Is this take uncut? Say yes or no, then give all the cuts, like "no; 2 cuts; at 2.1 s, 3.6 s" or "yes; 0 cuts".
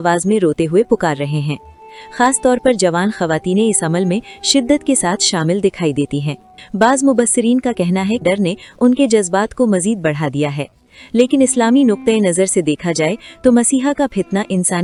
yes; 0 cuts